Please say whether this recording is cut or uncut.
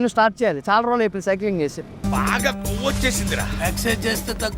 cut